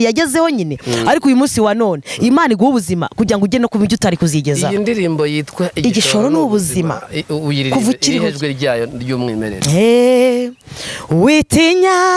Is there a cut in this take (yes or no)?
no